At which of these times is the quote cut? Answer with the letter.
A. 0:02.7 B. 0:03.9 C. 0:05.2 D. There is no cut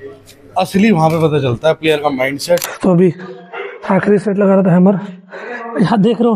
A